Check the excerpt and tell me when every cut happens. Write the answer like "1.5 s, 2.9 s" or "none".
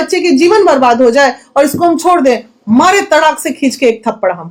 none